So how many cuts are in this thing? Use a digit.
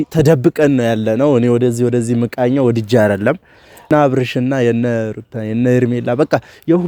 1